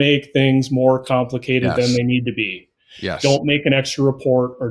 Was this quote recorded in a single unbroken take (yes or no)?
yes